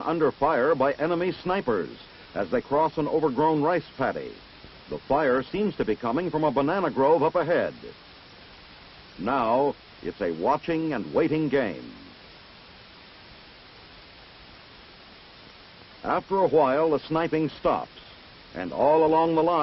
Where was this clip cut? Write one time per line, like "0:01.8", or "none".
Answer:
0:17.6